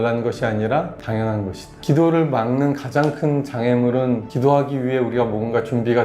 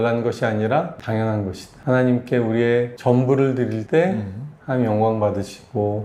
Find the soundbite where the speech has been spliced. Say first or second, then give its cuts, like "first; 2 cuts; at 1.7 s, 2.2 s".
first; 1 cut; at 1.8 s